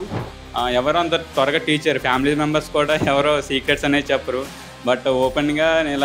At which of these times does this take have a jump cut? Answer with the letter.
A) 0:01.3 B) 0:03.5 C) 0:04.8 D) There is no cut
D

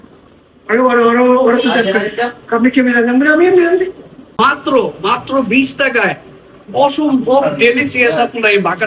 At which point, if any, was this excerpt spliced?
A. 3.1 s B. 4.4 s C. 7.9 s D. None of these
B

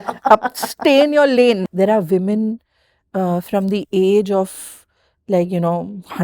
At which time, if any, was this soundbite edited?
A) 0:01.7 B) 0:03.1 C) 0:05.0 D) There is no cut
A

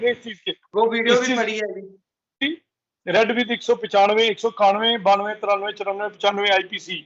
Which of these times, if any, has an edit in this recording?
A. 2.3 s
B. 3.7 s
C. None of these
A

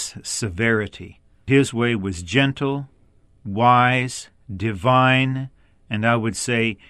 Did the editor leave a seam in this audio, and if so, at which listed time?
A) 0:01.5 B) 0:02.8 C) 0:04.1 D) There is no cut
A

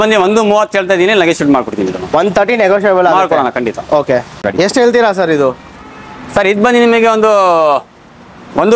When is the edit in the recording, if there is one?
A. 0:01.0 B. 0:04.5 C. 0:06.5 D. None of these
B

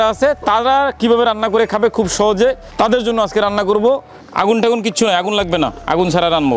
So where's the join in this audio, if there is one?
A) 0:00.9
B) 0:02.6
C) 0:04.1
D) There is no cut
C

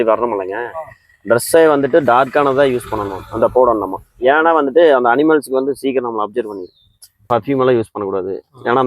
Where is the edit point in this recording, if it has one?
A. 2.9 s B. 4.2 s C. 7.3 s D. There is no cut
C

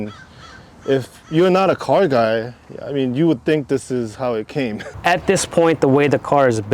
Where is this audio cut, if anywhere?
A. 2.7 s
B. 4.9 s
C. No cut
B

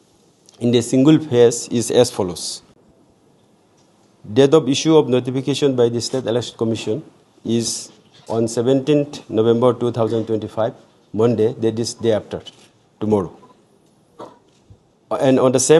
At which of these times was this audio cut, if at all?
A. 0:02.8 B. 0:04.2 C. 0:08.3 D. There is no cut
A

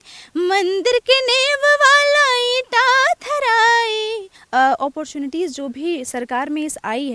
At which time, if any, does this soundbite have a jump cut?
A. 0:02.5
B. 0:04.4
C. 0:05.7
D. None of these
B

